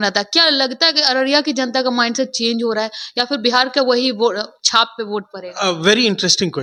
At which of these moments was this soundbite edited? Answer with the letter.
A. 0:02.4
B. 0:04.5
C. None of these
C